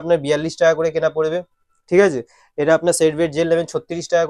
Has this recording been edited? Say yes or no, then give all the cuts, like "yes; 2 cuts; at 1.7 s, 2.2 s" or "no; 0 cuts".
no; 0 cuts